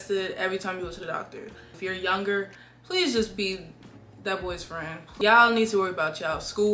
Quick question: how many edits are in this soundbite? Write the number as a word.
two